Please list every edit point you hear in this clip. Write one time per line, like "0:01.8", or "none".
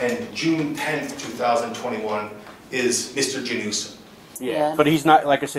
0:04.3

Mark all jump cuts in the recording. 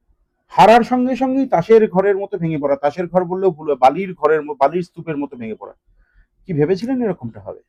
none

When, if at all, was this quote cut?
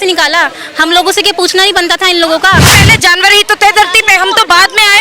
0:02.8

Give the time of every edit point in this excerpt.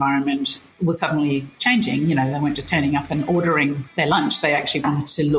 0:03.9

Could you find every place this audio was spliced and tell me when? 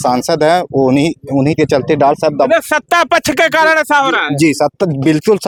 none

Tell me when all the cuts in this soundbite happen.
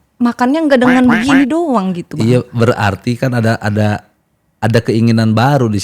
none

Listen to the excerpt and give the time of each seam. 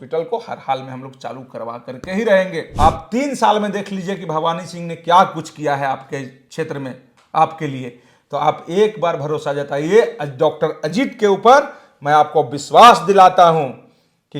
0:02.6

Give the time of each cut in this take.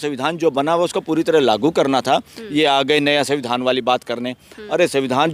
none

